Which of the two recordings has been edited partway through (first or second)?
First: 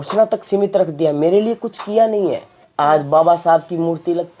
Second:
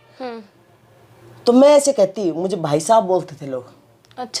first